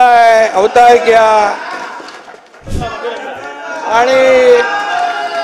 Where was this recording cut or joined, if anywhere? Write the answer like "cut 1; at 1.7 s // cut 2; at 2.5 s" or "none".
cut 1; at 2.7 s